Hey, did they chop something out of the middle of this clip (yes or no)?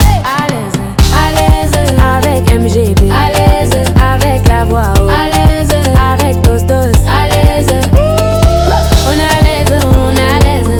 no